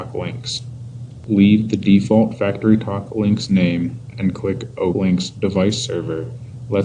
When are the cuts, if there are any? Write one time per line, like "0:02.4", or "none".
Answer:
0:04.9